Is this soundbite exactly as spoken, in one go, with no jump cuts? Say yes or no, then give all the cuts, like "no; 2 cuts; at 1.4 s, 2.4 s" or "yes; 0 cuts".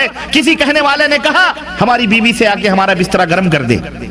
yes; 0 cuts